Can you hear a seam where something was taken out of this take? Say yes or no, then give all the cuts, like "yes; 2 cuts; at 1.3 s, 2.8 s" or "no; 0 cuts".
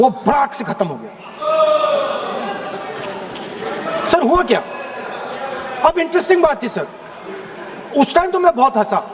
no; 0 cuts